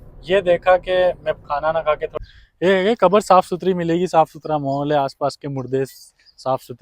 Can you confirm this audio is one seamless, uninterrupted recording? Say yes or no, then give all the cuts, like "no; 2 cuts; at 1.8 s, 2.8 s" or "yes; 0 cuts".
no; 1 cut; at 2.1 s